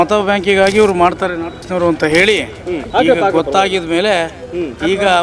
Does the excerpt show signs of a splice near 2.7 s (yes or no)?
yes